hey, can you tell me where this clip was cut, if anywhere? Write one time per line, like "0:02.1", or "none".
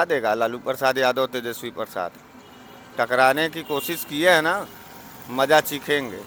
none